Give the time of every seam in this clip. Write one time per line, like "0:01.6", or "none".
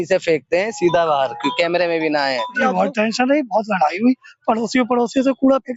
0:02.6